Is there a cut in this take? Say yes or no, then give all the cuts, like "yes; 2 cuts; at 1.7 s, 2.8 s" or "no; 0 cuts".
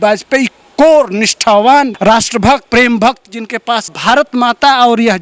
yes; 2 cuts; at 2.4 s, 4.0 s